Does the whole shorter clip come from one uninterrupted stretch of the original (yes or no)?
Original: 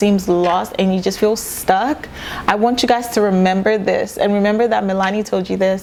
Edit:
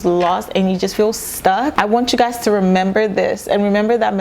no